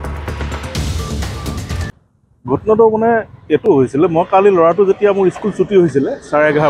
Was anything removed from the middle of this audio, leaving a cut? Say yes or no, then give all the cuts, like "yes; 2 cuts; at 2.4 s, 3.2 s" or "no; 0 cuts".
yes; 1 cut; at 1.9 s